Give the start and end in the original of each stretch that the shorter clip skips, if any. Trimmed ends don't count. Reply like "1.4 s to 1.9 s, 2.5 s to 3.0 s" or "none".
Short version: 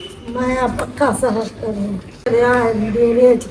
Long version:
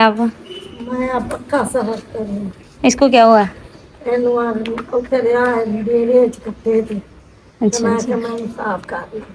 2.8 s to 5.2 s